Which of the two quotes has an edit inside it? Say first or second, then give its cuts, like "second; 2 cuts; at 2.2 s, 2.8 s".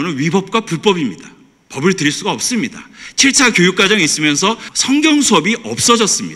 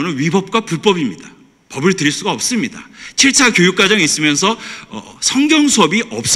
first; 1 cut; at 4.7 s